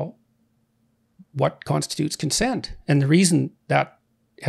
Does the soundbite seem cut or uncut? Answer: uncut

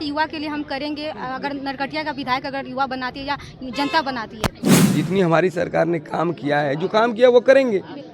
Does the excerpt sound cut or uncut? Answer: cut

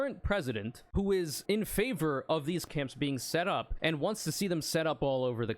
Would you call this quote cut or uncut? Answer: cut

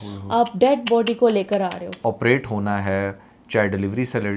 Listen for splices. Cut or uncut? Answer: cut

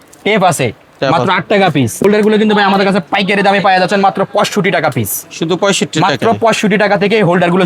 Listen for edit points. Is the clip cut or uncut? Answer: cut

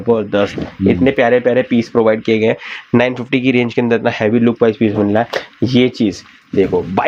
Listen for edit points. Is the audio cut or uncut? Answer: uncut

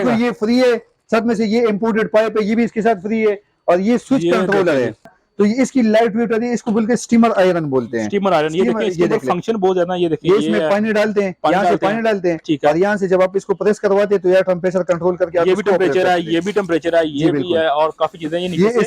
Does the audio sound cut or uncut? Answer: cut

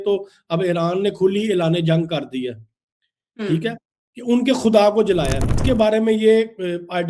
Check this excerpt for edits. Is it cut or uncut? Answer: cut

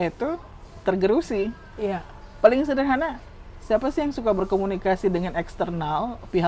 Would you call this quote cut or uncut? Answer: uncut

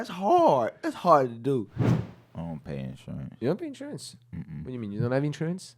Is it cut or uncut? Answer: cut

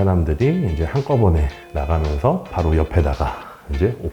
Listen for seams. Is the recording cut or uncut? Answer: cut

